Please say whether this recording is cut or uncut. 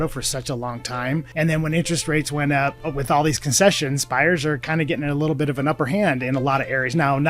cut